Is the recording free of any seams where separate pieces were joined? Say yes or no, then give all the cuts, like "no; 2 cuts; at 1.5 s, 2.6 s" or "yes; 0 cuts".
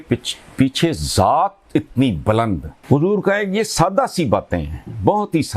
no; 1 cut; at 2.7 s